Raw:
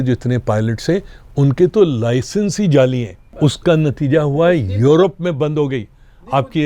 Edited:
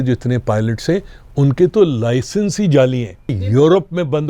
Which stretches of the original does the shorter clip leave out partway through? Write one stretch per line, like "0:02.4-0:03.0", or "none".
0:03.3-0:04.6